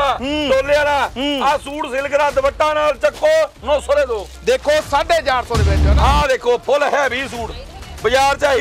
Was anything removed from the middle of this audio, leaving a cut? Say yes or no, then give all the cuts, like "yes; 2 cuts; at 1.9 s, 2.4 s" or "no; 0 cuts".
no; 0 cuts